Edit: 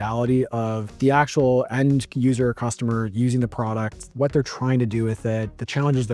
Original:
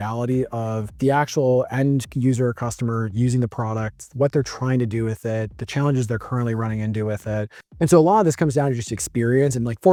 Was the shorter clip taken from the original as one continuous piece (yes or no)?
yes